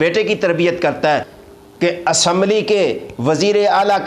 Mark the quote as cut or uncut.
cut